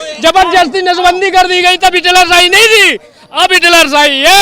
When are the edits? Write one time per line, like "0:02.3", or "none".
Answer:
none